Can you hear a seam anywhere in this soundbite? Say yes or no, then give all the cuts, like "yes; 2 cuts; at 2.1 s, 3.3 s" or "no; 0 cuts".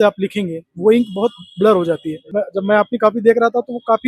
yes; 1 cut; at 2.3 s